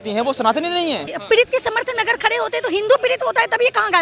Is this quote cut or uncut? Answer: cut